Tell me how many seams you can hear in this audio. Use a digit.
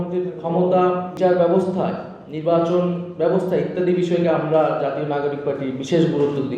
1